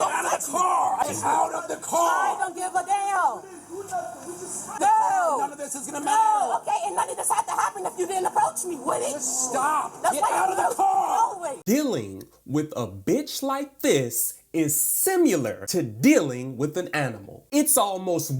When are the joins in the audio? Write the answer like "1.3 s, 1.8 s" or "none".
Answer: 1.1 s, 4.8 s, 11.5 s